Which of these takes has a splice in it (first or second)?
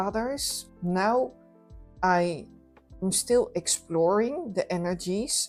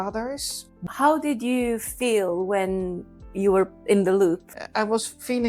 second